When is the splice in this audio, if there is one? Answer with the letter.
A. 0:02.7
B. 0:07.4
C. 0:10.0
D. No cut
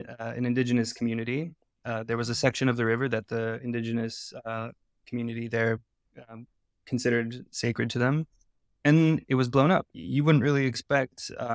C